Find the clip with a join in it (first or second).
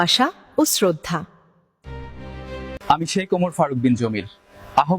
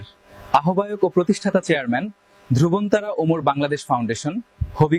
first